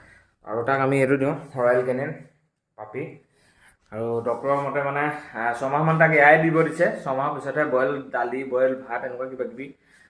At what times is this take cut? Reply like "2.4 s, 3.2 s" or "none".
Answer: none

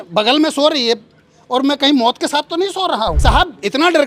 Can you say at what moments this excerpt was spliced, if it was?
3.2 s

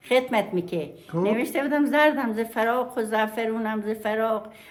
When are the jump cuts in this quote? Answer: none

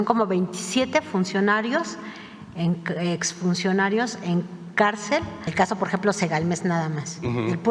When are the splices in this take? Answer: 5.5 s

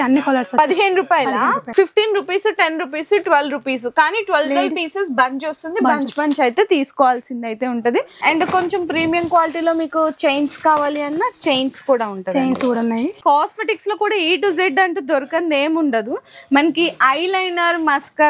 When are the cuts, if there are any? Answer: 1.6 s, 8.0 s, 13.2 s

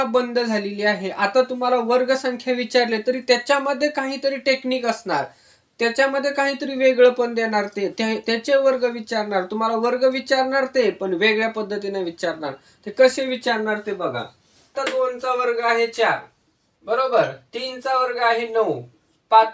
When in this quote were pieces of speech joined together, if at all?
14.8 s

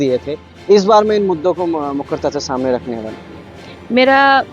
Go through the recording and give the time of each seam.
none

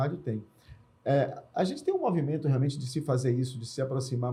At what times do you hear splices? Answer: none

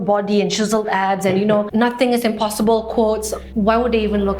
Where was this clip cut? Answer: 1.7 s, 3.4 s

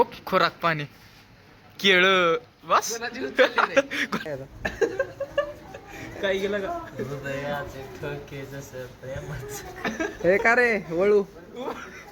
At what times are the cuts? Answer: 4.2 s

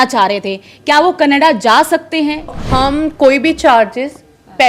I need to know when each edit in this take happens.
2.5 s

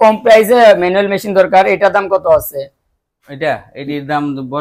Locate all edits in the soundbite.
none

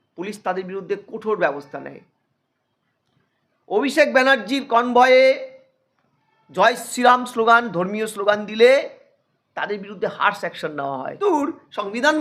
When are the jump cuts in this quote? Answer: 11.1 s

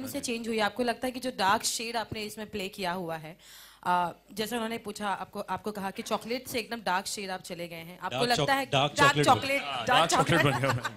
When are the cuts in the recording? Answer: 5.0 s

